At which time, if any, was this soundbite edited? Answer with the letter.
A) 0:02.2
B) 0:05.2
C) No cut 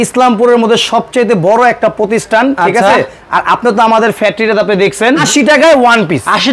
B